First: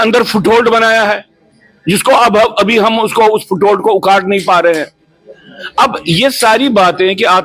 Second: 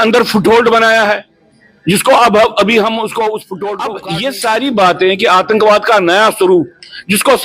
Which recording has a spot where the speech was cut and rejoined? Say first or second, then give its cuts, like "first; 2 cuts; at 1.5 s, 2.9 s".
second; 1 cut; at 3.8 s